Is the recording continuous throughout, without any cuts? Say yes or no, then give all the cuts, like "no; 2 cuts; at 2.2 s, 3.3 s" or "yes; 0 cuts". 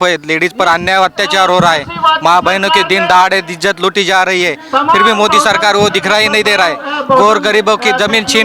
yes; 0 cuts